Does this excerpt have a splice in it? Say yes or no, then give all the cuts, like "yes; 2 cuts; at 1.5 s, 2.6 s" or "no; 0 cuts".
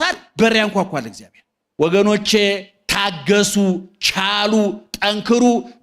yes; 1 cut; at 1.6 s